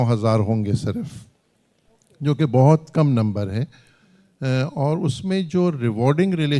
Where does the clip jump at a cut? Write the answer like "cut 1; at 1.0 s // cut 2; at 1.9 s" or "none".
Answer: none